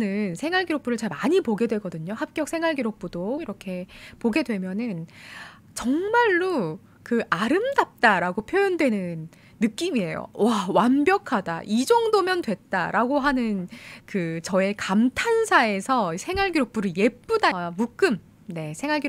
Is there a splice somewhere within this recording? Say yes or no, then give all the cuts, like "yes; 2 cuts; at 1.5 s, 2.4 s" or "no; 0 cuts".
yes; 2 cuts; at 3.4 s, 17.5 s